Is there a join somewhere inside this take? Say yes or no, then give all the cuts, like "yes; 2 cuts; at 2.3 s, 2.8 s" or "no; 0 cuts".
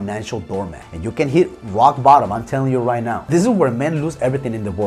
yes; 1 cut; at 3.2 s